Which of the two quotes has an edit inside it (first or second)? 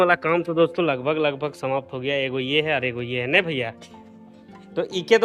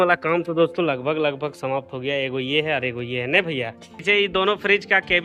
second